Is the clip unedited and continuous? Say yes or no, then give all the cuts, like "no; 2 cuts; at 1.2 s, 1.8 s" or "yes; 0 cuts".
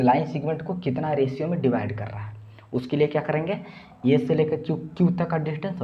yes; 0 cuts